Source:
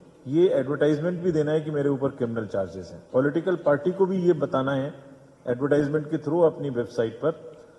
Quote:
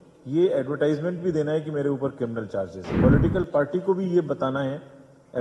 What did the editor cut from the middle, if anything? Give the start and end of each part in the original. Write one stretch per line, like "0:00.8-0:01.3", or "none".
0:02.8-0:02.9